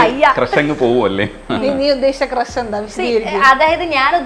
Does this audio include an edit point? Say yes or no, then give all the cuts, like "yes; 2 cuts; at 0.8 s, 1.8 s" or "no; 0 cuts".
yes; 1 cut; at 1.4 s